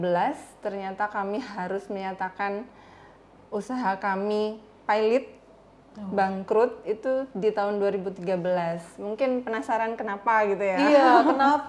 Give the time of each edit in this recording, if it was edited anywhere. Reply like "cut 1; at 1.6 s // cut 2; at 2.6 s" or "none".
none